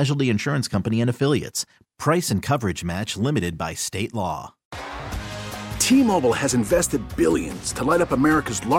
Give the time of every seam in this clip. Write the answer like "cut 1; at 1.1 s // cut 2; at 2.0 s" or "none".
cut 1; at 4.6 s